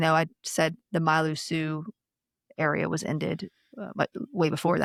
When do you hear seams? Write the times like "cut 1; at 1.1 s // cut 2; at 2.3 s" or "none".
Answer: none